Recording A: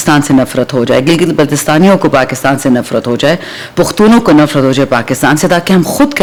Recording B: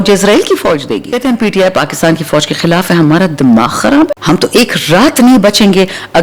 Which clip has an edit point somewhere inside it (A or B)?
B